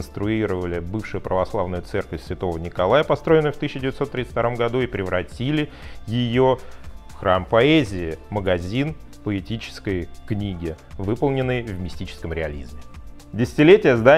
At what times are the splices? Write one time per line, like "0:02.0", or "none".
none